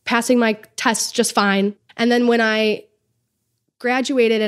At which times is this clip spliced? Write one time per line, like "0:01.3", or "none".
0:01.8